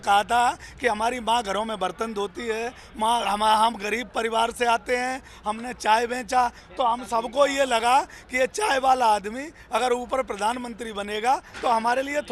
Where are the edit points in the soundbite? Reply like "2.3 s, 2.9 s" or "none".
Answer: none